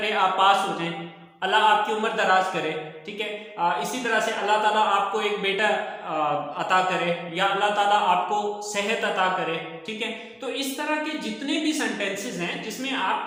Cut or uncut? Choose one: uncut